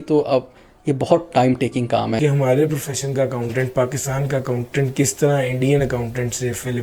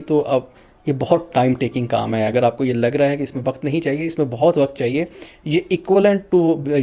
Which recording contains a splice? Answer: first; 1 cut; at 2.2 s

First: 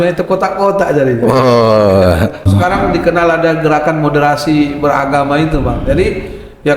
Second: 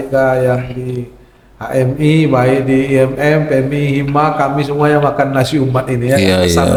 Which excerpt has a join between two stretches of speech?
first; 1 cut; at 2.5 s

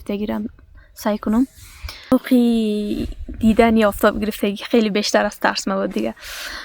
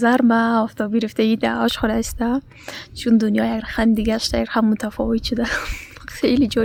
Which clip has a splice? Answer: first; 1 cut; at 2.1 s

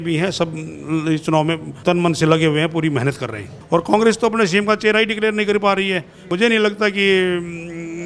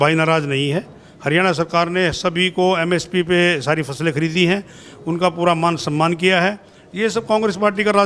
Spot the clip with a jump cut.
first; 3 cuts; at 1.7 s, 3.5 s, 6.2 s

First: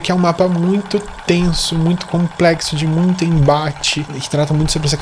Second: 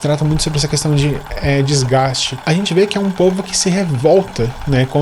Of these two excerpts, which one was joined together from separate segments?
second; 1 cut; at 2.3 s

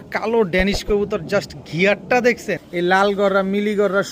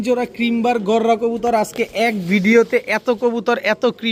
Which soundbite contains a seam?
first; 1 cut; at 2.6 s

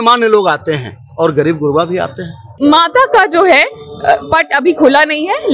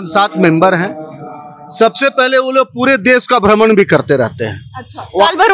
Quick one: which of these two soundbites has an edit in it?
first; 1 cut; at 2.5 s

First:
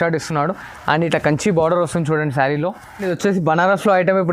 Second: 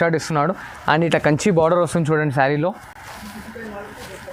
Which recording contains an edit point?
first; 1 cut; at 3.0 s

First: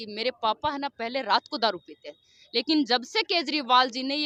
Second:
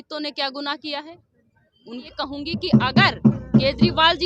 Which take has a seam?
second; 1 cut; at 2.1 s

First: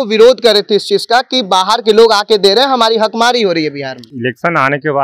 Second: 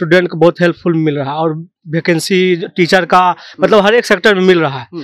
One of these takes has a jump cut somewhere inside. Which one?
first; 1 cut; at 4.1 s

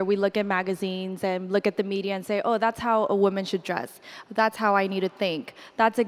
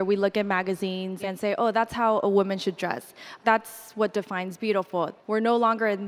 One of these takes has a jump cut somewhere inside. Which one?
second; 3 cuts; at 1.2 s, 3.3 s, 5.2 s

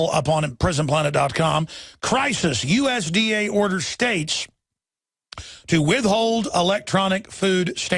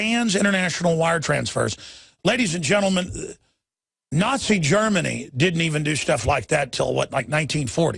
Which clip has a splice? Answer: second; 1 cut; at 5.2 s

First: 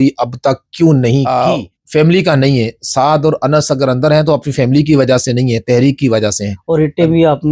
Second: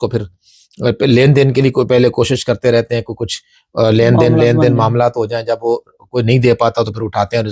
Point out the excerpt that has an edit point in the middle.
first; 2 cuts; at 1.3 s, 6.5 s

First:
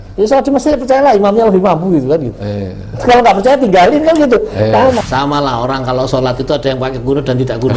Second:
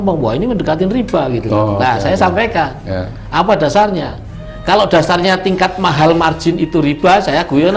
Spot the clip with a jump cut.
first; 1 cut; at 5.0 s

